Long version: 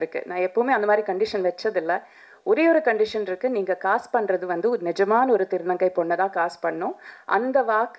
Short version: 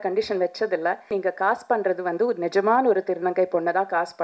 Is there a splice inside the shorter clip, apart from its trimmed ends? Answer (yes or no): yes